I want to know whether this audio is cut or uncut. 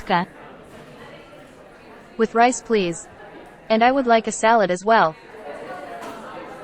cut